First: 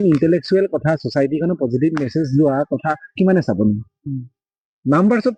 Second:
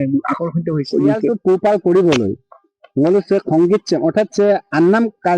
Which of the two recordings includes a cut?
second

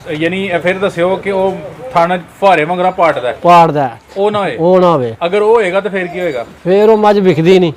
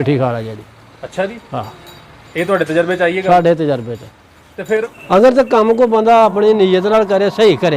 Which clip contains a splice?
second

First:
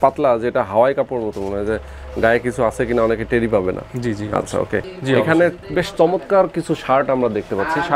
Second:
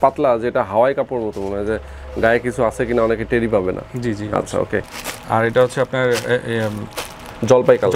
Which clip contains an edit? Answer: first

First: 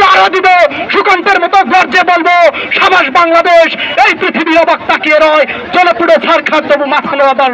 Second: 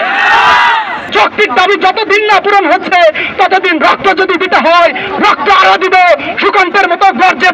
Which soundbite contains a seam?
second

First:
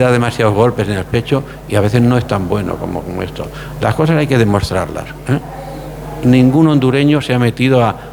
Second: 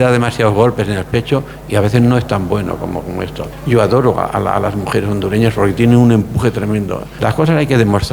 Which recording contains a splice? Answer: second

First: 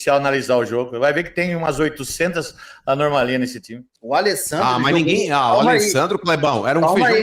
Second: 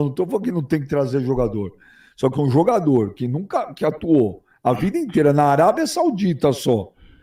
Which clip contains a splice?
first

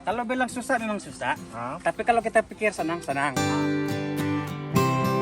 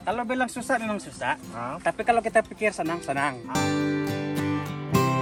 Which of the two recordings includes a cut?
first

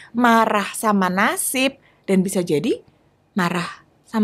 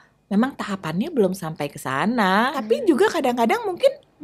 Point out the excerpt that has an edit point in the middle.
second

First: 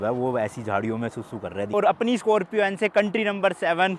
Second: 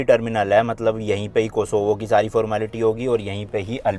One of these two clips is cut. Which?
first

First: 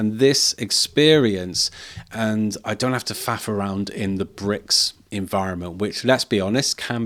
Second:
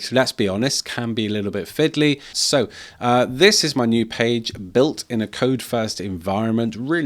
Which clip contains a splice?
second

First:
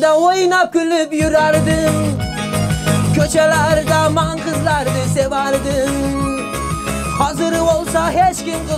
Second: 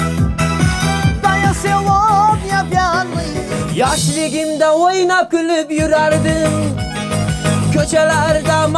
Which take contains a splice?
second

